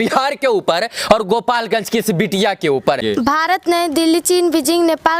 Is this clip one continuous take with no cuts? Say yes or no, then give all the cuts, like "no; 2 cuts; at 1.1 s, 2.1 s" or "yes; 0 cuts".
no; 1 cut; at 3.0 s